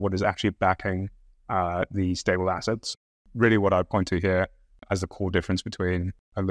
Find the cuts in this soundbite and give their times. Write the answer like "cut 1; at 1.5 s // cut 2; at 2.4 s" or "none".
cut 1; at 2.8 s